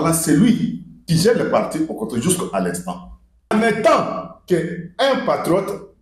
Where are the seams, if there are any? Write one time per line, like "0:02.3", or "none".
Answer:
0:03.5